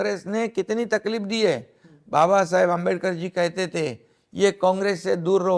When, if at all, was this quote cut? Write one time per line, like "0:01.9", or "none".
none